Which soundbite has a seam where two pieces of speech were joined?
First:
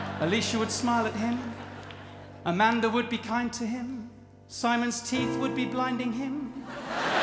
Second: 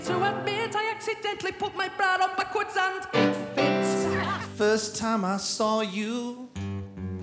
second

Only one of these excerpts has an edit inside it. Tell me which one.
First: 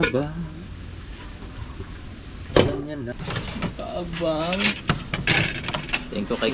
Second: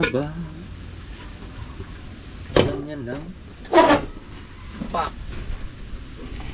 first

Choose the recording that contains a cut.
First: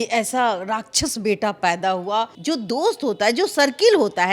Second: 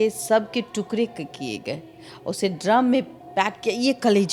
first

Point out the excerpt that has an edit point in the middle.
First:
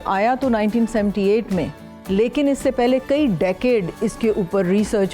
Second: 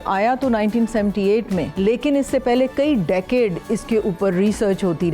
second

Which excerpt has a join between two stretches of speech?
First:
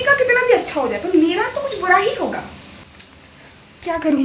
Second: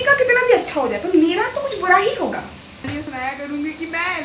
second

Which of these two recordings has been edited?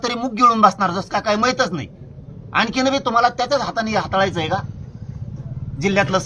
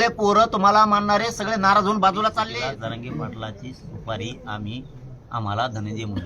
second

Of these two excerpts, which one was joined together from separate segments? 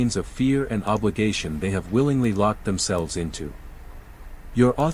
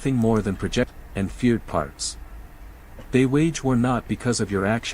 second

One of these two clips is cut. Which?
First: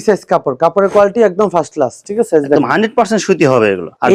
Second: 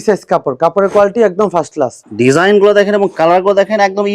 second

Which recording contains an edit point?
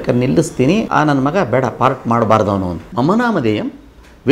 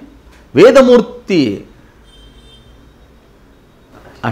first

